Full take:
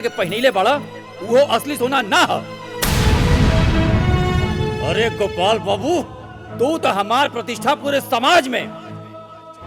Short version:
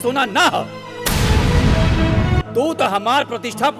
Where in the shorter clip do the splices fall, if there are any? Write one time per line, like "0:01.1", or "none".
0:02.4